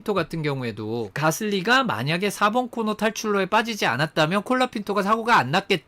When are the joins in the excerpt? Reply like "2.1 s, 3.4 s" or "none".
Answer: 1.1 s